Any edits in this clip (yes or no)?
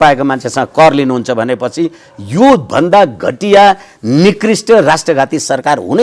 no